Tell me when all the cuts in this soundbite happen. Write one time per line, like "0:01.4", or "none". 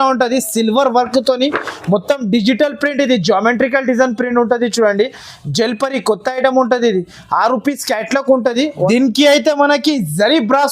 0:08.8